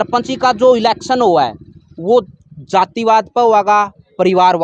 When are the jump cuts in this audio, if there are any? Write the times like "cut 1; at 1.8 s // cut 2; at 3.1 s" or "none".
none